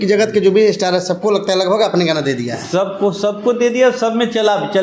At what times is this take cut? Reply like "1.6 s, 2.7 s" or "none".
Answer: none